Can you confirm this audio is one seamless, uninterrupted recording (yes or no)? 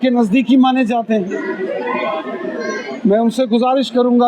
yes